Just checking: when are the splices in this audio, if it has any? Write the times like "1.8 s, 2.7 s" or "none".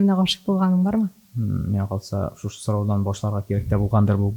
1.3 s